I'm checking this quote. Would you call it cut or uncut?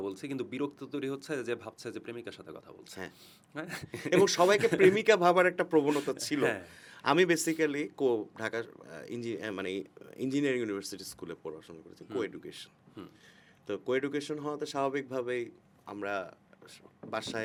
uncut